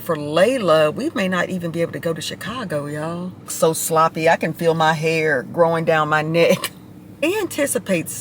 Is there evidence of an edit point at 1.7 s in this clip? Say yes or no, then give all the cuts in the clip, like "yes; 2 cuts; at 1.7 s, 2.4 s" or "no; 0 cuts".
no; 2 cuts; at 3.5 s, 7.3 s